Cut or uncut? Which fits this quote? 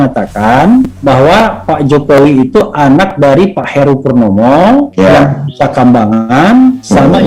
uncut